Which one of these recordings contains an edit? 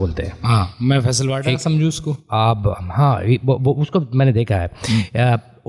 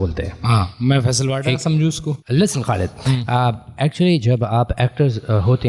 second; 1 cut; at 2.1 s

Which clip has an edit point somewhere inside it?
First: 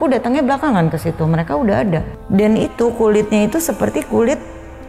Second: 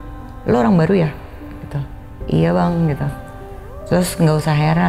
first; 1 cut; at 2.1 s

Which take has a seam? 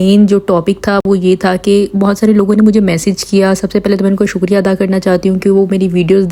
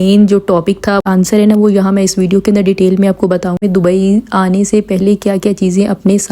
second; 2 cuts; at 1.0 s, 3.6 s

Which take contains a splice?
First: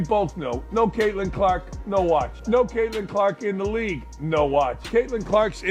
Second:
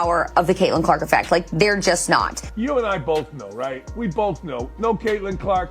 second; 1 cut; at 2.4 s

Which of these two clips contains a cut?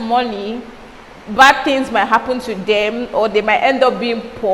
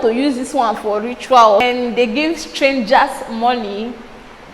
second; 1 cut; at 1.6 s

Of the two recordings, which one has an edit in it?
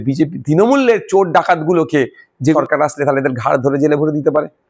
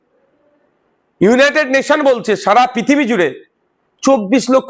first; 1 cut; at 2.5 s

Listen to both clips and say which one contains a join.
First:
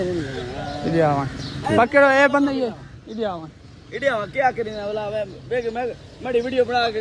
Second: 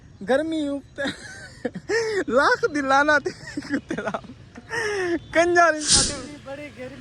second; 1 cut; at 5.9 s

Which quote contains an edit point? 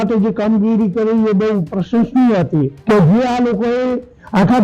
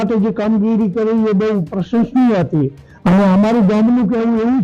first; 1 cut; at 2.7 s

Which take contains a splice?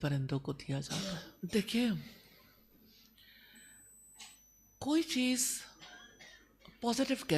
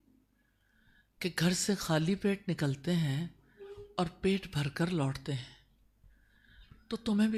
first; 1 cut; at 1.3 s

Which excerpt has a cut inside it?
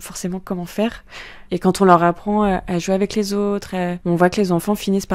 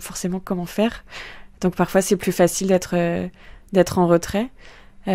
first; 2 cuts; at 1.4 s, 4.0 s

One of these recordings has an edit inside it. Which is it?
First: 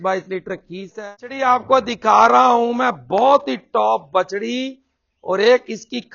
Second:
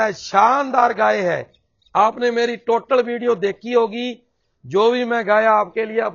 first; 1 cut; at 0.9 s

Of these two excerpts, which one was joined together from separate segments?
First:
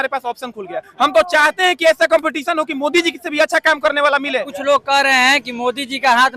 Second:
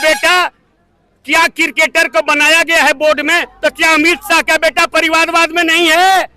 first; 1 cut; at 4.5 s

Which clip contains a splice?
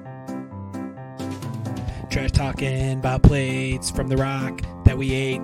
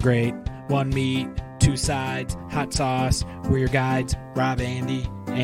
first; 1 cut; at 1.2 s

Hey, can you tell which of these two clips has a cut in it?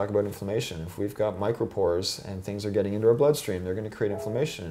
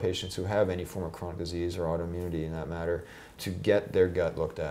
second; 1 cut; at 3.4 s

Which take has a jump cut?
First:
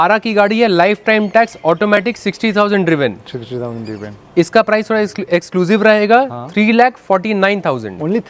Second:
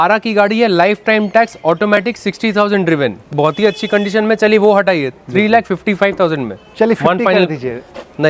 second; 1 cut; at 3.3 s

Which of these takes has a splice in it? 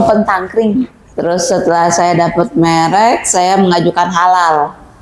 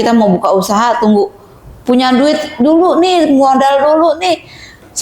first; 1 cut; at 1.0 s

